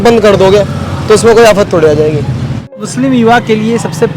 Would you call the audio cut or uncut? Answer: cut